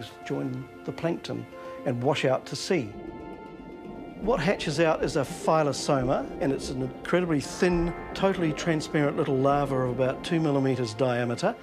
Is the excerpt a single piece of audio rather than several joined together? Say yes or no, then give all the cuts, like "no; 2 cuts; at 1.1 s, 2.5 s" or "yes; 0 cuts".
no; 1 cut; at 3.3 s